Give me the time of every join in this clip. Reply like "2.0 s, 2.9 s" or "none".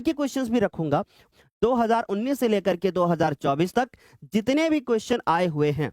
1.2 s